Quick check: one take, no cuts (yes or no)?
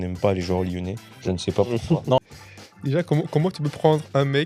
no